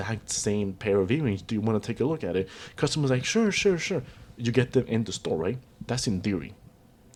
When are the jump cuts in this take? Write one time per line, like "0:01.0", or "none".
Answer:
none